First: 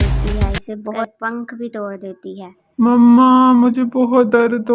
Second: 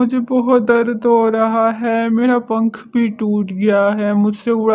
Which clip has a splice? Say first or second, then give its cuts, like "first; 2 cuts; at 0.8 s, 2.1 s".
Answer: first; 1 cut; at 1.1 s